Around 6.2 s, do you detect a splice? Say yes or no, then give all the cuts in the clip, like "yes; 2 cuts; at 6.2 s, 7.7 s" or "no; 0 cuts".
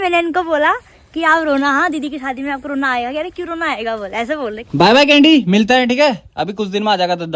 no; 1 cut; at 4.6 s